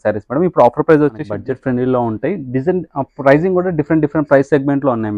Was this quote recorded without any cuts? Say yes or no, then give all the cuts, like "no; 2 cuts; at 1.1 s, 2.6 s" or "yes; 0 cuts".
no; 1 cut; at 1.3 s